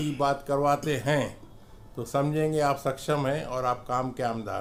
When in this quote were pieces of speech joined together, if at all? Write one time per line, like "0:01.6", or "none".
none